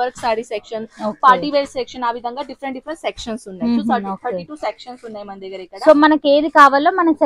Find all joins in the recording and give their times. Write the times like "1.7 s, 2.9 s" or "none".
none